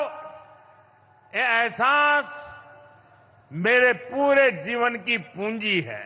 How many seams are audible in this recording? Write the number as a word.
zero